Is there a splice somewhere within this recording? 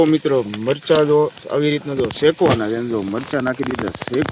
no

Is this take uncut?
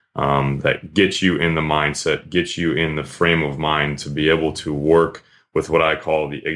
yes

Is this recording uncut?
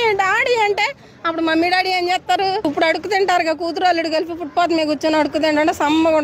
no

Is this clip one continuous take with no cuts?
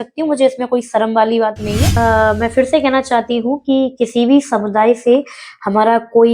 no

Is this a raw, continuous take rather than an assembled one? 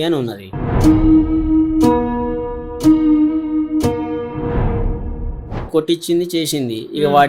no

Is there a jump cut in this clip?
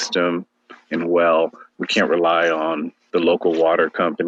no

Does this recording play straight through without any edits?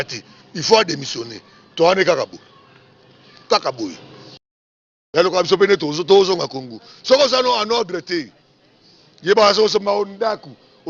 no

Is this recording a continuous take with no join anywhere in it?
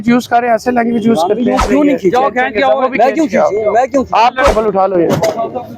no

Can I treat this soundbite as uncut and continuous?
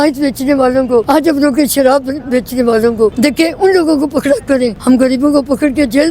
no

